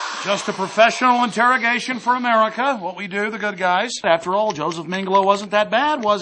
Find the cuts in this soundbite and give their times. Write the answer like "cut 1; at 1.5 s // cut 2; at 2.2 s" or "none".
none